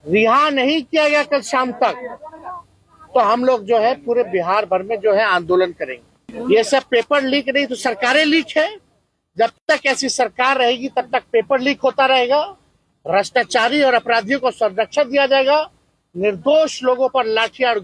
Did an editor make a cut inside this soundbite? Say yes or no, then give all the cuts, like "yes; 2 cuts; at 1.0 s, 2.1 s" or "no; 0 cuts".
yes; 1 cut; at 6.3 s